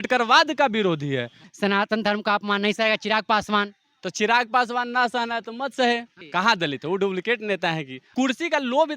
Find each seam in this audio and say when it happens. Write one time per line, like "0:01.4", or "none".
0:01.4
0:06.2
0:08.0